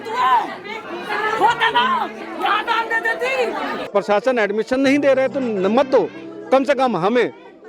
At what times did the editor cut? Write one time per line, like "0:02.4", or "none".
0:03.9